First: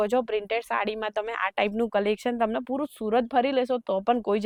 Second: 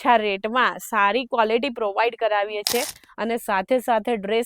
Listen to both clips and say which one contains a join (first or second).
second